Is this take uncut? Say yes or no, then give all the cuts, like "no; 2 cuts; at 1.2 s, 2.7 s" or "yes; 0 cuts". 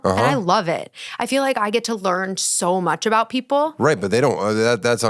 yes; 0 cuts